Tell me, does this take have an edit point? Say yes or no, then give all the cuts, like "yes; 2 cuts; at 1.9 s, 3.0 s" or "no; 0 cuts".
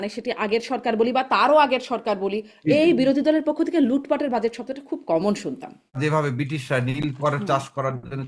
yes; 1 cut; at 6.0 s